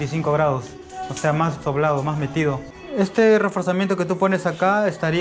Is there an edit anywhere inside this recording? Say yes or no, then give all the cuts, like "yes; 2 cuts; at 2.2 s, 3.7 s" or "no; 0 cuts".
yes; 1 cut; at 2.8 s